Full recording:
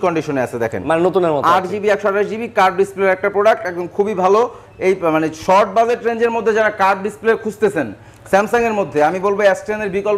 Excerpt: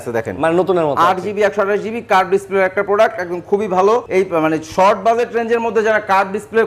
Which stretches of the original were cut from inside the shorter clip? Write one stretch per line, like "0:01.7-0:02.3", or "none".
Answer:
0:04.5-0:04.8